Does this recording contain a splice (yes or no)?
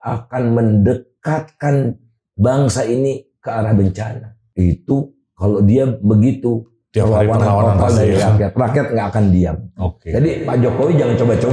yes